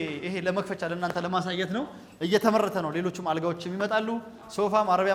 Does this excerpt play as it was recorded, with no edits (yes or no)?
yes